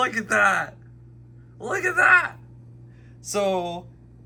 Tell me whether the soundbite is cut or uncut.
uncut